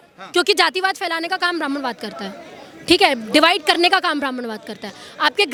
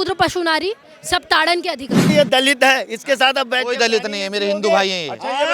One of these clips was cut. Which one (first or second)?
second